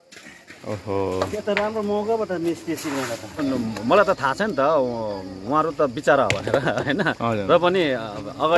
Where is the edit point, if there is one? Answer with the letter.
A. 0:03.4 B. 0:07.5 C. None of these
A